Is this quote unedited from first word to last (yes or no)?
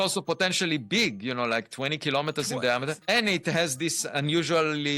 no